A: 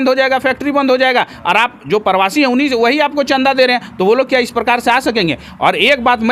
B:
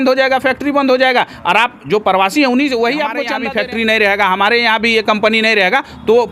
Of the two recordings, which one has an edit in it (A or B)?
B